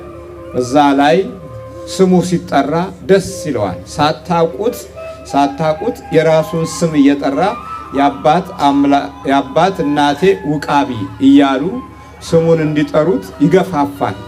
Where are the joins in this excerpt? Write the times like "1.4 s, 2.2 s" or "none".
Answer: none